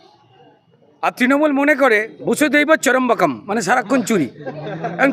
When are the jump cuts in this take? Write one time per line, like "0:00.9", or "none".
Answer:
none